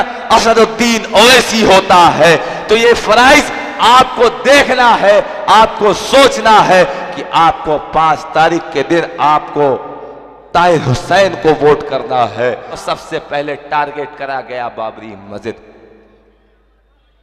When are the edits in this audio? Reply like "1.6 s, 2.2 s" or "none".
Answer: 12.7 s

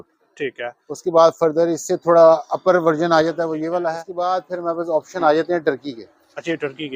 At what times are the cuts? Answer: 4.1 s

